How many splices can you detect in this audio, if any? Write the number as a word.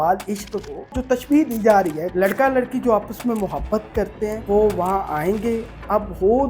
three